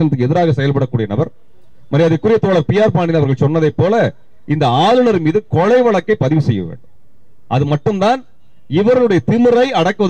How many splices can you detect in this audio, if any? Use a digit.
0